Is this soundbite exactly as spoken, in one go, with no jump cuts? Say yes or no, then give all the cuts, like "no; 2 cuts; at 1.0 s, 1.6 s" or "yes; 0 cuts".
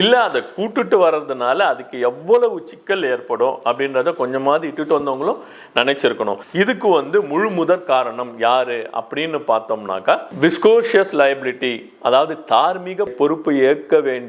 no; 1 cut; at 6.4 s